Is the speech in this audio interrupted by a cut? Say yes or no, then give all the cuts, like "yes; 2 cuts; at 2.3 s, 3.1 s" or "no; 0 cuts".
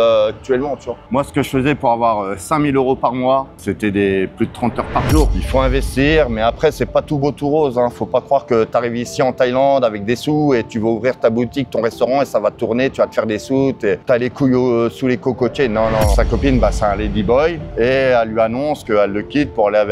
yes; 6 cuts; at 1.0 s, 3.5 s, 5.4 s, 14.0 s, 16.1 s, 18.8 s